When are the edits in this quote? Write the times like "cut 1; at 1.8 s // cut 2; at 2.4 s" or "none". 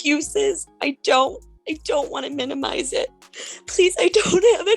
cut 1; at 3.3 s